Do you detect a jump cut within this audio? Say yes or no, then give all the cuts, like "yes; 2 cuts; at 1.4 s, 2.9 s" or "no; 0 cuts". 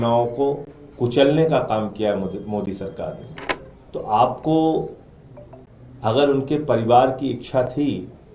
yes; 1 cut; at 3.7 s